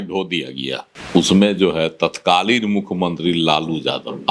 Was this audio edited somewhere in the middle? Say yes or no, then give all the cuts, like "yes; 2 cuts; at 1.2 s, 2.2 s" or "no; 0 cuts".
yes; 1 cut; at 0.9 s